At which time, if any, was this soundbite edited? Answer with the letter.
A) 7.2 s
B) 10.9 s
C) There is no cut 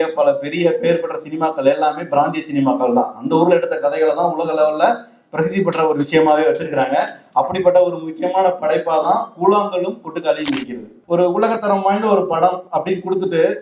B